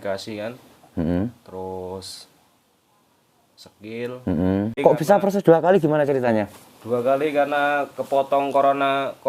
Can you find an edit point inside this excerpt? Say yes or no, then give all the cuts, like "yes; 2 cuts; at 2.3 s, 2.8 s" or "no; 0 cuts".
yes; 1 cut; at 4.8 s